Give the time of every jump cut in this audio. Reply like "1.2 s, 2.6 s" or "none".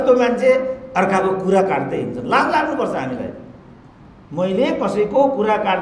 none